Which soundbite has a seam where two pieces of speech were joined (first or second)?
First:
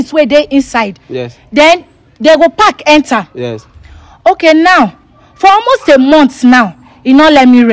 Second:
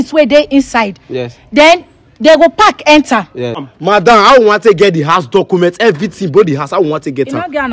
second